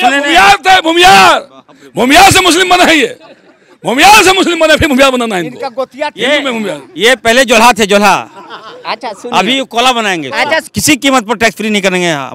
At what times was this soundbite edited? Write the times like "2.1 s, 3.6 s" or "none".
10.7 s